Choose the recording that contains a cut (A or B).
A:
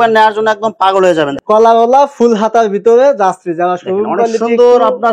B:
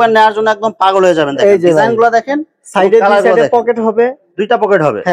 A